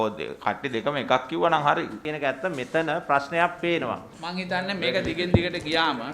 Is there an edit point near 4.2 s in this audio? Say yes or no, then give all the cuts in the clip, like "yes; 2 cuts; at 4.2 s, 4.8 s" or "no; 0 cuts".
yes; 2 cuts; at 2.1 s, 4.2 s